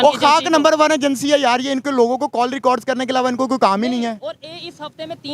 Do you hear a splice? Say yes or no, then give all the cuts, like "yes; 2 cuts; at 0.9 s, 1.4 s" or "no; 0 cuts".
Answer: no; 0 cuts